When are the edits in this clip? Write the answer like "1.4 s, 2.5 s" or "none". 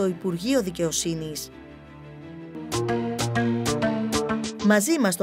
none